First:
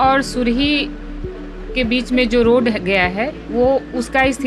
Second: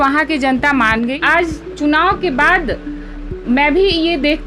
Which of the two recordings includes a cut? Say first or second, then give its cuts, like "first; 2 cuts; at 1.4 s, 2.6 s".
second; 1 cut; at 1.2 s